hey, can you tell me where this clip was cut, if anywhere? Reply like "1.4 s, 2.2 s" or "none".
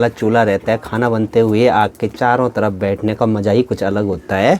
none